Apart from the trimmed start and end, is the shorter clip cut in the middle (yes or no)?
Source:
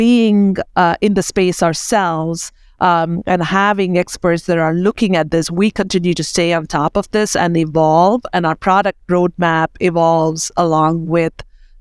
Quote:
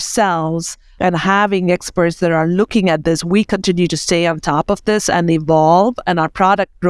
yes